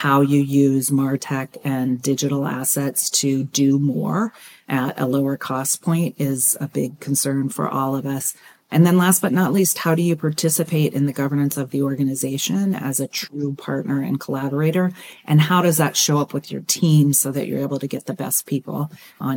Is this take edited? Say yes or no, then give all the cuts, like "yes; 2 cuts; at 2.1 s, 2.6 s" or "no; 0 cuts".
no; 0 cuts